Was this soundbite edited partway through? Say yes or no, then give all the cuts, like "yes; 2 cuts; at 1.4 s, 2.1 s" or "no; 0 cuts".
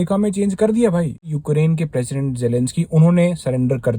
yes; 1 cut; at 1.3 s